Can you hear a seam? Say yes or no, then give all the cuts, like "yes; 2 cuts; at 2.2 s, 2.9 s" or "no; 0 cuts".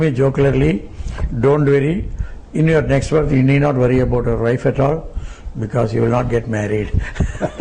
no; 0 cuts